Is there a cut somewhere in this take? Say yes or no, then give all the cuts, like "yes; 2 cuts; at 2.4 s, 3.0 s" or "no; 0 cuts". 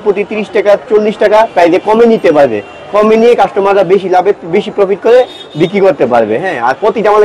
no; 0 cuts